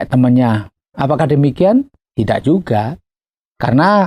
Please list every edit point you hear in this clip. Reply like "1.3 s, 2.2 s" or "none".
none